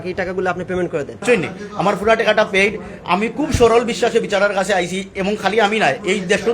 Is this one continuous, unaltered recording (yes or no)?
no